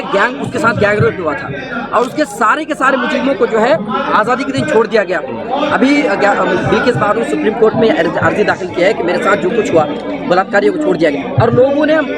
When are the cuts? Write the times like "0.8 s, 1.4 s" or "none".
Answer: none